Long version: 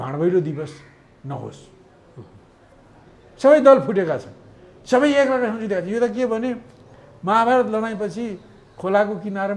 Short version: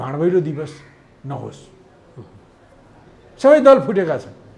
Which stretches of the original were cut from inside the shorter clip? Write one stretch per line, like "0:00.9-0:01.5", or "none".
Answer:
none

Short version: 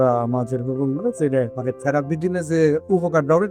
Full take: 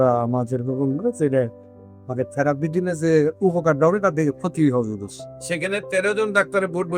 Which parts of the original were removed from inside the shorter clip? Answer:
0:01.5-0:02.1

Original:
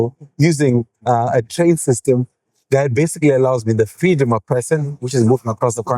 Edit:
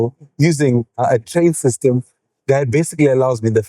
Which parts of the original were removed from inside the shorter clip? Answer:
0:01.0-0:01.2

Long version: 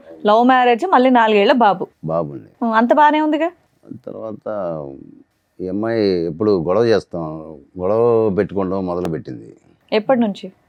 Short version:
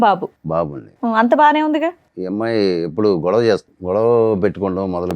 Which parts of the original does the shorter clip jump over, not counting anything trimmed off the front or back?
0:03.7-0:05.5
0:07.1-0:07.7

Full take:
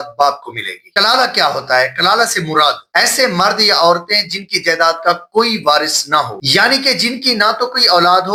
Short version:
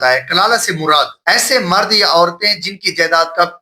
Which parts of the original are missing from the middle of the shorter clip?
none

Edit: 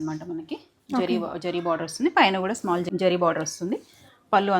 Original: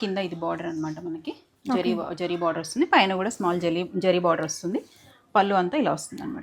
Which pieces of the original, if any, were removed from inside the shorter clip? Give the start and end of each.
0:03.6-0:03.9

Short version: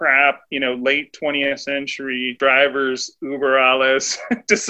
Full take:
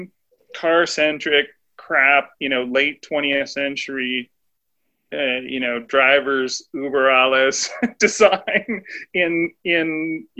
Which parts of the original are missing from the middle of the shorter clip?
0:04.2-0:05.9

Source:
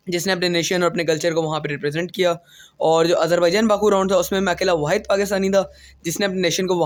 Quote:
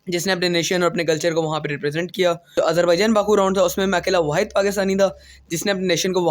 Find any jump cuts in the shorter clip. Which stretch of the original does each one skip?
0:02.6-0:03.1

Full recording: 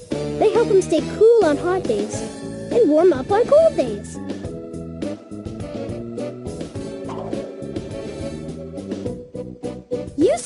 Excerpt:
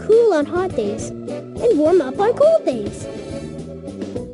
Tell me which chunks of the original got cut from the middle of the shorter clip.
0:03.9-0:07.7

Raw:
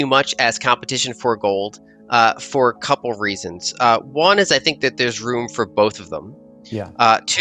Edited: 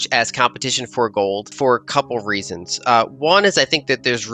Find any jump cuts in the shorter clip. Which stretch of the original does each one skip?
0:01.8-0:02.4

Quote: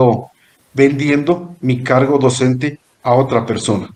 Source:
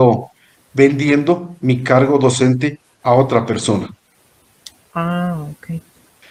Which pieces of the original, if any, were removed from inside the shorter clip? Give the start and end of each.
none

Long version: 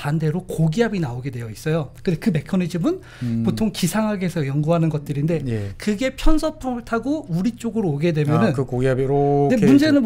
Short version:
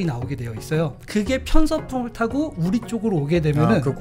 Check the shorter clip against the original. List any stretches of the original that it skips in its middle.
0:01.9-0:05.7

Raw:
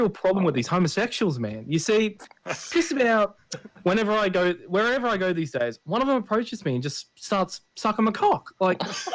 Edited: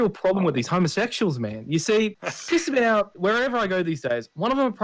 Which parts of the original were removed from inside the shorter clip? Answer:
0:02.3-0:02.5
0:03.4-0:04.6

